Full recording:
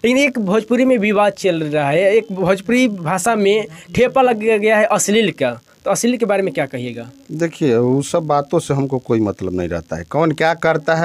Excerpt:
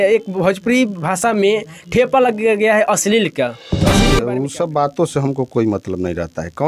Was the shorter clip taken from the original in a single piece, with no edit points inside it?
no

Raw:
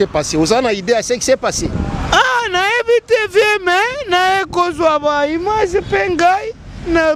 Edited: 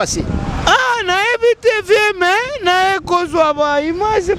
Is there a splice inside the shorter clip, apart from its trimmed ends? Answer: no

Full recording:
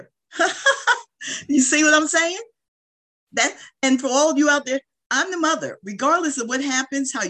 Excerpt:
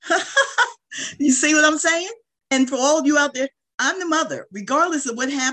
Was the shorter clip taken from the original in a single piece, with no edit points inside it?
no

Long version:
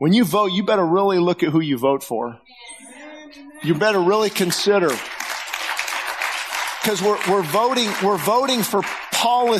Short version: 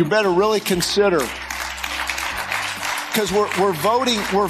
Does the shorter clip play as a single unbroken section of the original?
yes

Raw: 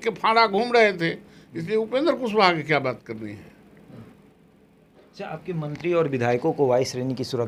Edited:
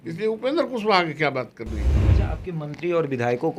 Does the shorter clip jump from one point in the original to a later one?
yes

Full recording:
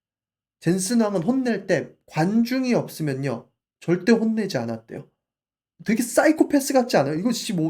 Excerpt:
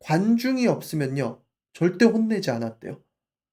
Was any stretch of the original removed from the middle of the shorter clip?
no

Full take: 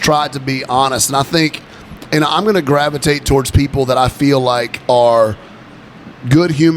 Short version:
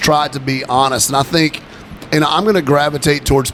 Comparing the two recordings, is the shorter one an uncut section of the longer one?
yes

